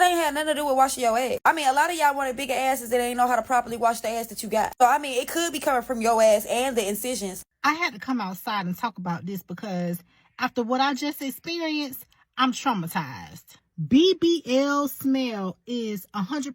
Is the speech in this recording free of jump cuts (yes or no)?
no